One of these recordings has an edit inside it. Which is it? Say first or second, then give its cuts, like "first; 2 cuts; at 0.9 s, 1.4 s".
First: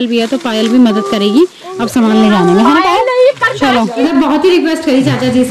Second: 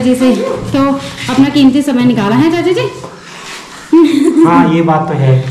first; 1 cut; at 4.0 s